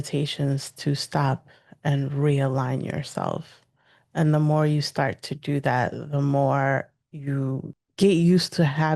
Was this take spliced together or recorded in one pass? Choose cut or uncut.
cut